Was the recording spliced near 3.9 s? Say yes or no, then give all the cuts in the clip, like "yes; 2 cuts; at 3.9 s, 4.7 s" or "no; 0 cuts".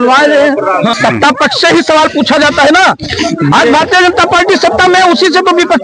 no; 1 cut; at 1.0 s